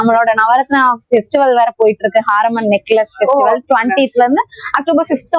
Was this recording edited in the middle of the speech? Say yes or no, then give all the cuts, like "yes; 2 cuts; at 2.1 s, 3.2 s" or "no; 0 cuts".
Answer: no; 0 cuts